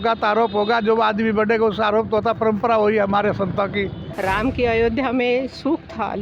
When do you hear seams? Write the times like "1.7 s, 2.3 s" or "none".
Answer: 4.0 s